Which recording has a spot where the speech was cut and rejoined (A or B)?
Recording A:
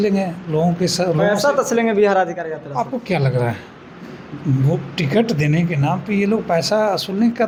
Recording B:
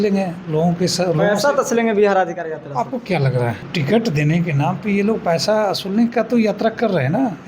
B